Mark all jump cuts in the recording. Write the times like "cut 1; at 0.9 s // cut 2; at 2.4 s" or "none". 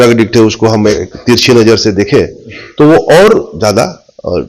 cut 1; at 1.0 s